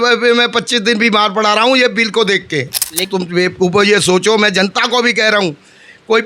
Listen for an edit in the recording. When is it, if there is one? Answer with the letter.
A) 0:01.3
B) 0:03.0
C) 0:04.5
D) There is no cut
B